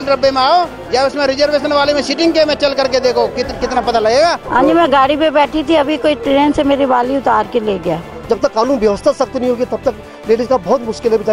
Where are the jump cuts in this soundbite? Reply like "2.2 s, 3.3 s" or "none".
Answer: 4.4 s, 8.1 s